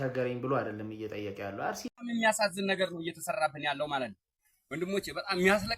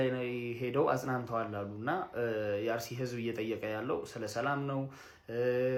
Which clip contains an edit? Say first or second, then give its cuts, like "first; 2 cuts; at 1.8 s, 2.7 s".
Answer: first; 1 cut; at 1.8 s